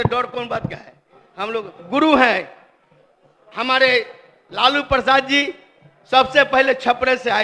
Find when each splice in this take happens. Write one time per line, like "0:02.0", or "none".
0:01.8